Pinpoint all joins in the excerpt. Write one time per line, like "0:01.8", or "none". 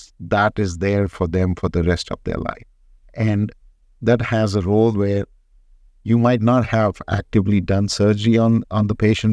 none